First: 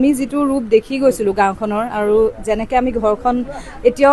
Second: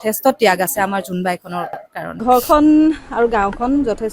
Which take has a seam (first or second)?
second